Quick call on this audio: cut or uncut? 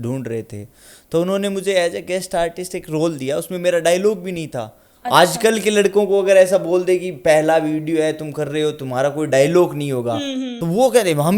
uncut